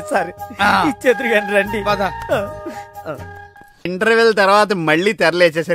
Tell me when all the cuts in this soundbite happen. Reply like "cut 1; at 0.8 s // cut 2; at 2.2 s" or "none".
cut 1; at 3.8 s